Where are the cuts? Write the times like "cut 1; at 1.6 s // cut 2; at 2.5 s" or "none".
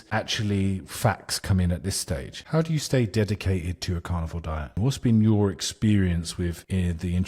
cut 1; at 2.3 s // cut 2; at 4.7 s